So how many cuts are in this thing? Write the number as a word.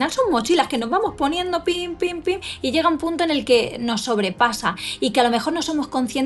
zero